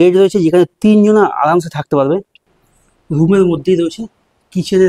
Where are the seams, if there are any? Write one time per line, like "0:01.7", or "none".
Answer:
0:02.5